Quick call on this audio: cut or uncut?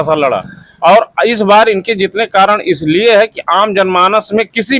uncut